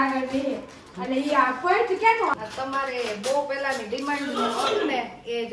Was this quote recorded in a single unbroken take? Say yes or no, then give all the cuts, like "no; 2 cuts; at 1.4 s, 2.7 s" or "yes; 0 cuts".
no; 1 cut; at 2.3 s